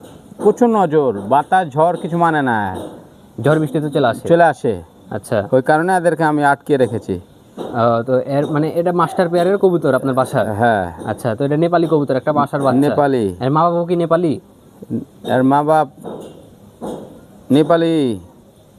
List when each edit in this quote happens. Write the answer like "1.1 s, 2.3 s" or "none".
none